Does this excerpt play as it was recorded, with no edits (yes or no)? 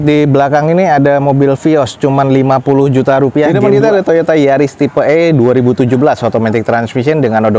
no